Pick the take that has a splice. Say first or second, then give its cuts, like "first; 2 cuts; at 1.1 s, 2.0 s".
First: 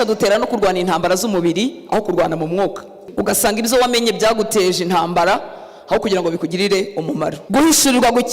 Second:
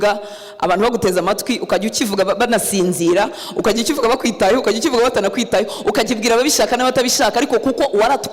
first; 2 cuts; at 3.0 s, 7.4 s